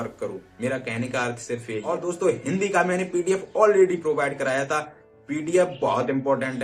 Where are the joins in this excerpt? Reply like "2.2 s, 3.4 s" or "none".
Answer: 1.9 s